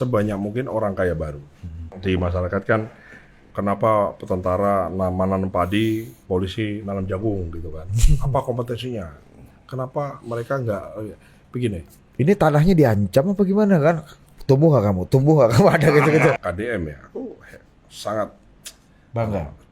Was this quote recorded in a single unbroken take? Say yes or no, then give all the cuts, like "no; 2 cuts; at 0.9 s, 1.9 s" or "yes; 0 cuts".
no; 2 cuts; at 1.9 s, 16.4 s